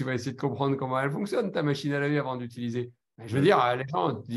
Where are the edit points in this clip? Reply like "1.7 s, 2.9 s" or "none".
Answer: none